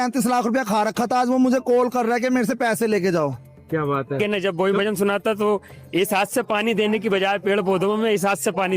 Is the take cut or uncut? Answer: cut